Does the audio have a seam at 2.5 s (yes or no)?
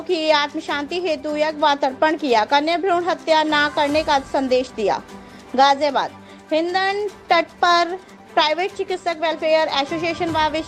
no